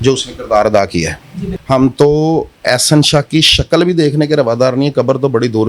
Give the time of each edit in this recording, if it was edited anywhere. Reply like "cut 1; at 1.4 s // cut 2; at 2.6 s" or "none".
cut 1; at 1.5 s

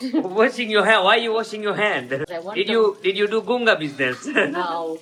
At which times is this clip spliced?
none

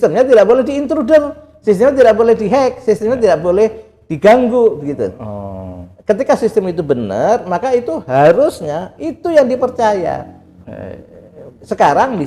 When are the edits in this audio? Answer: none

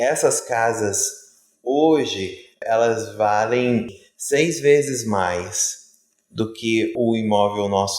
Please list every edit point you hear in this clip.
cut 1; at 2.6 s // cut 2; at 3.9 s // cut 3; at 6.9 s

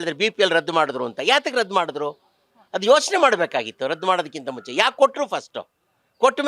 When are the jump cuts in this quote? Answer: none

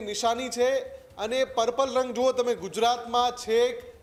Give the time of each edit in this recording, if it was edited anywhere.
none

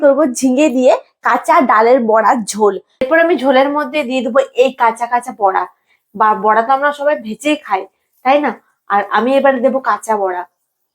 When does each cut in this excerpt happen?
cut 1; at 3.0 s

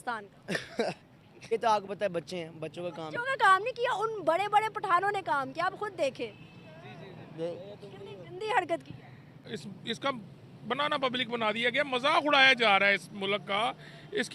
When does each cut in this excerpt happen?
cut 1; at 1.5 s // cut 2; at 9.4 s

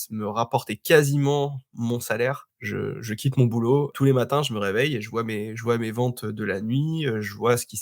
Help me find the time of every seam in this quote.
cut 1; at 2.5 s // cut 2; at 3.9 s

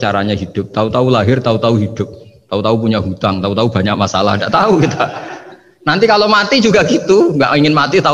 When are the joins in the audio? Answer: none

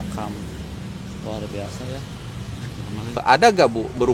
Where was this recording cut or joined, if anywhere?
cut 1; at 3.2 s

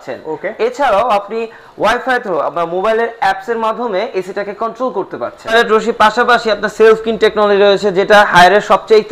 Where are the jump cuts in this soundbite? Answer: cut 1; at 5.5 s

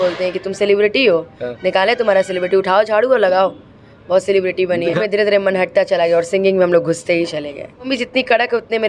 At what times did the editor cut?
cut 1; at 5.0 s // cut 2; at 7.9 s

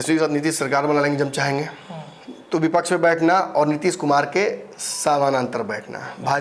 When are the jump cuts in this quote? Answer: none

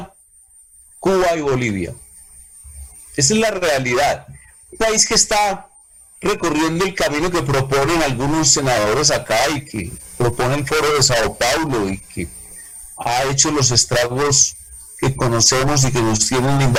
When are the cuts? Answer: none

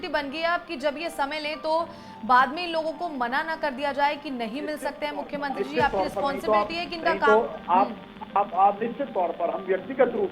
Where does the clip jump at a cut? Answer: none

